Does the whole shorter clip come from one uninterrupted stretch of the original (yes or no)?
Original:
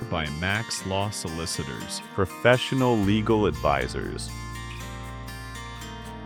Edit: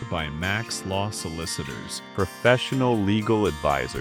yes